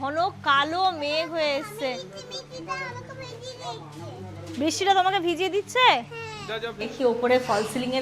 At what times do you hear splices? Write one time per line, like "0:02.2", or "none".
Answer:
0:06.9